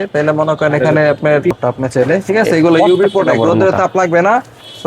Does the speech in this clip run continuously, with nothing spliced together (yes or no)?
no